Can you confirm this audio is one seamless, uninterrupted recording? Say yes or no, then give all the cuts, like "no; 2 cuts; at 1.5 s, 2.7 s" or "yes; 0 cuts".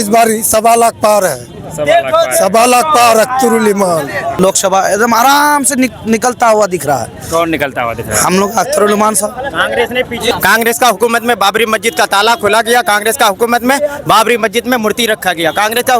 no; 2 cuts; at 4.3 s, 10.3 s